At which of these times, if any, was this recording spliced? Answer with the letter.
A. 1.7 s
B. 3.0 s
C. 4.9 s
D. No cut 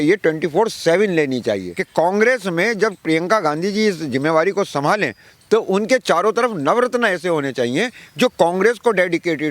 A